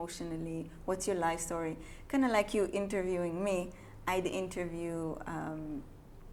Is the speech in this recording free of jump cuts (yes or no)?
yes